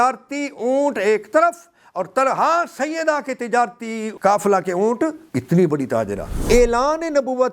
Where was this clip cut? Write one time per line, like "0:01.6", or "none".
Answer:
0:04.1
0:05.2
0:06.3